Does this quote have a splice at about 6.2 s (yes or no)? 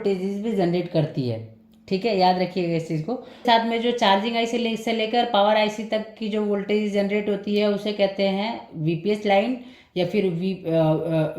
no